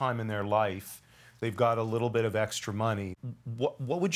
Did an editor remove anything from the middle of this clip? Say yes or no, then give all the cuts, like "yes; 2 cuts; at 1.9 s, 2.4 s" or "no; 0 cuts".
yes; 1 cut; at 3.1 s